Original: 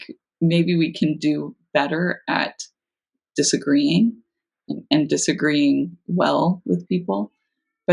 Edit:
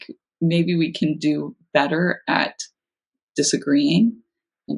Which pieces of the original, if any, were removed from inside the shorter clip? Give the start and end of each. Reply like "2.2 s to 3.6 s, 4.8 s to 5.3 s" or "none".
none